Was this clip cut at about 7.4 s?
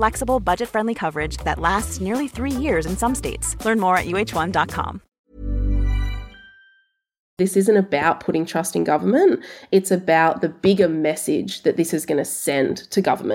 yes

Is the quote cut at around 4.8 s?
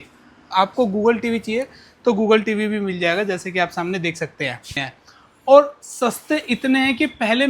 yes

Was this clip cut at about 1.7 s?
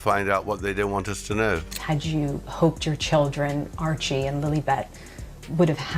yes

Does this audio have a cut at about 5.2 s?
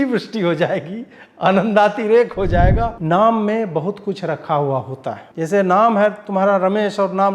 yes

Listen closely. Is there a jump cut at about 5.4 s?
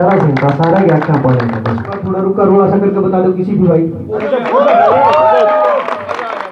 no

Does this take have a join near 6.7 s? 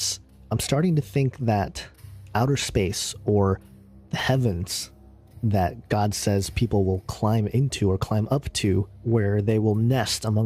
yes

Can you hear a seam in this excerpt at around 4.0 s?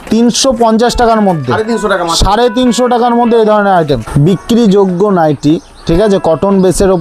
yes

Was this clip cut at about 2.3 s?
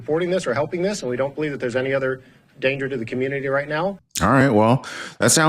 no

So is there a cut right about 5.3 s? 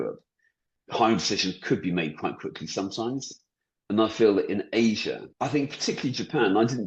yes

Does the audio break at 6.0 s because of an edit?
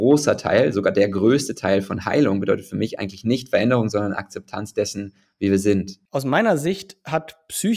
yes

